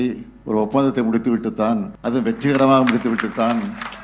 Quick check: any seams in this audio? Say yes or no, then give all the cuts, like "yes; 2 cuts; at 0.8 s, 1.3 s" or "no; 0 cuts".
yes; 1 cut; at 1.9 s